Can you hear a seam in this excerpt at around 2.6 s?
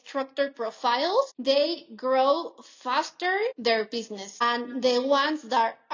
no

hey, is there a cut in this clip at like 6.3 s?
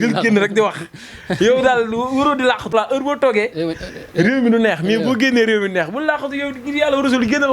no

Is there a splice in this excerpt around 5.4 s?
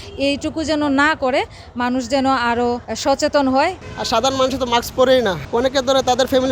yes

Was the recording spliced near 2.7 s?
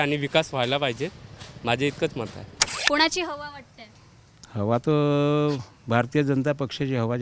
yes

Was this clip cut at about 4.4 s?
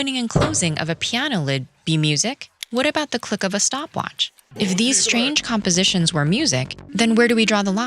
yes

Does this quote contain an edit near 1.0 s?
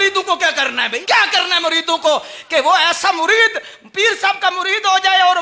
yes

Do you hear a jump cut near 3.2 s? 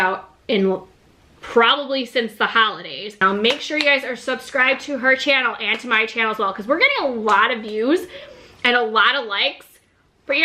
yes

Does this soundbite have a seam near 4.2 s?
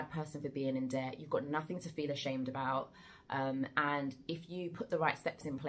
no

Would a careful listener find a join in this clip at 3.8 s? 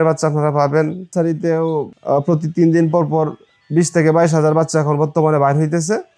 no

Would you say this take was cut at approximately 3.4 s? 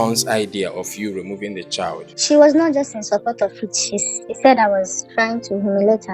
no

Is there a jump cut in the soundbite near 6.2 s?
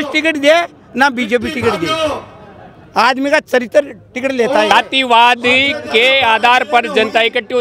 no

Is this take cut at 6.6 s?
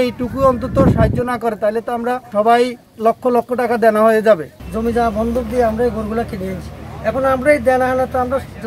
no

